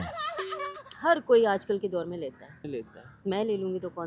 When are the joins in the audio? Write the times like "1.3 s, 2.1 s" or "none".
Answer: 3.0 s